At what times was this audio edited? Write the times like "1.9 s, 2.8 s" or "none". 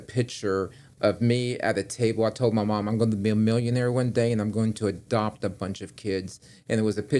none